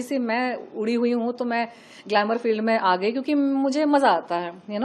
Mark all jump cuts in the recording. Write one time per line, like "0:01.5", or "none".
none